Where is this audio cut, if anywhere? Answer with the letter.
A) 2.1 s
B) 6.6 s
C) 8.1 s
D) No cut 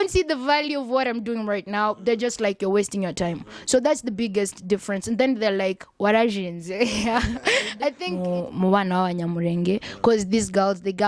C